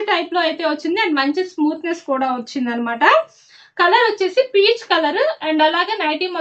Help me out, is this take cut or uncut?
uncut